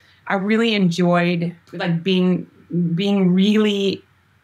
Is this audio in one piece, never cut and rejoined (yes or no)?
no